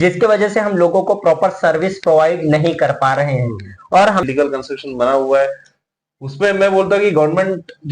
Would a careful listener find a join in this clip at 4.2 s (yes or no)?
yes